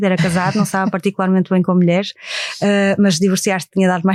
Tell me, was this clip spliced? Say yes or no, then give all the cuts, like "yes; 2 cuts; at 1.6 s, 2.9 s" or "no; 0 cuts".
no; 0 cuts